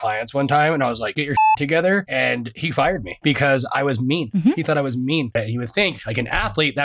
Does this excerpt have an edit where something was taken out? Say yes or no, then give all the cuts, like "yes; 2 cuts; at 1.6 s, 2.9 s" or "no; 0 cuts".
yes; 4 cuts; at 1.1 s, 2.5 s, 4.3 s, 5.3 s